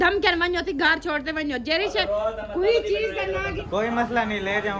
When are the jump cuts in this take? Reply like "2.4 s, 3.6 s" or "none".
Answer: 3.6 s